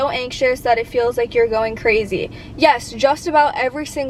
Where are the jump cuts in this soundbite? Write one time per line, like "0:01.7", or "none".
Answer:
none